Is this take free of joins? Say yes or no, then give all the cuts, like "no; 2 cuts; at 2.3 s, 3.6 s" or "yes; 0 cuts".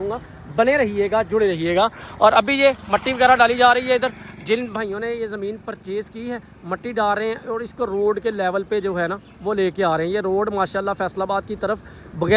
yes; 0 cuts